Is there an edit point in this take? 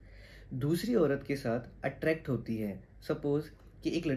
no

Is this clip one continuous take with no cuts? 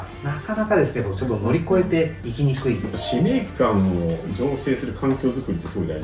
no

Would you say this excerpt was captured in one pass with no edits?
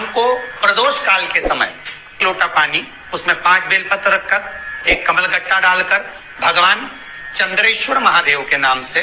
no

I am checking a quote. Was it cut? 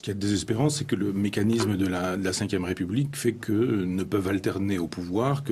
no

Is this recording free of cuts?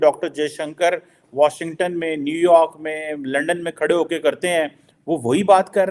yes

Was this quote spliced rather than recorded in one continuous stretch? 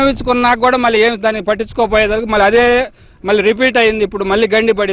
no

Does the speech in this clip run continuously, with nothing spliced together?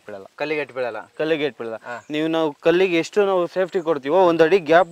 yes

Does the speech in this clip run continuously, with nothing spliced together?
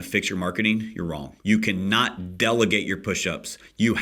no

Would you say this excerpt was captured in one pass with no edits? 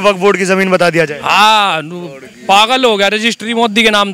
yes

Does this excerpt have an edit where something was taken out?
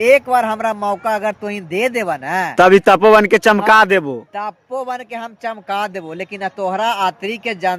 no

